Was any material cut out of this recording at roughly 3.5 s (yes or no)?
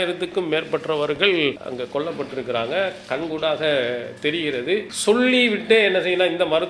no